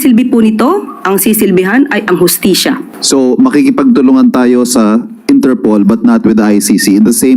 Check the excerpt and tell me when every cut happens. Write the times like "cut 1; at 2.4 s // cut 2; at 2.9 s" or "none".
cut 1; at 2.9 s